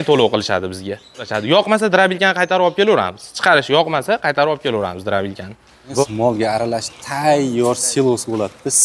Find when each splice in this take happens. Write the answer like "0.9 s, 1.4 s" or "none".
1.3 s, 6.0 s